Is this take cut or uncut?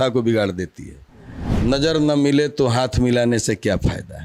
cut